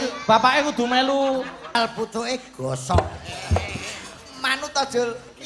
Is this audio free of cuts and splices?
no; 1 cut; at 1.7 s

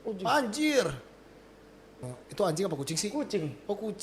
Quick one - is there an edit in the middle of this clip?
yes; 1 cut; at 2.0 s

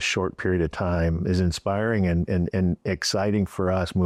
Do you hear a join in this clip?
no; 0 cuts

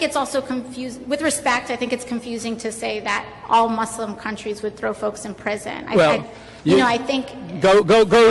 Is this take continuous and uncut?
no; 1 cut; at 5.9 s

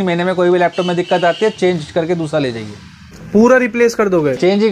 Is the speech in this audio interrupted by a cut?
no; 0 cuts

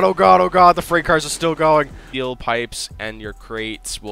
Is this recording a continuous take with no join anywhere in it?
no; 1 cut; at 2.0 s

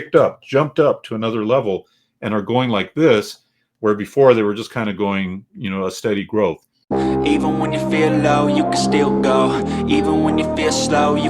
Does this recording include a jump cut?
yes; 1 cut; at 6.7 s

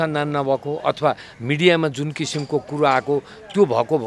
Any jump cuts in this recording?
no; 0 cuts

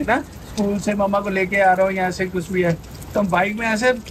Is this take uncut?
yes; 0 cuts

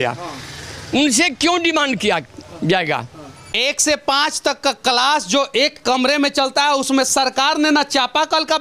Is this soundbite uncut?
no; 1 cut; at 3.5 s

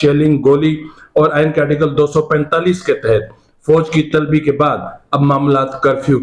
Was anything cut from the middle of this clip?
no; 0 cuts

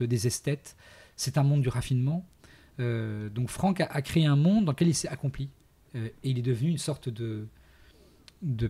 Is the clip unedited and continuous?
yes; 0 cuts

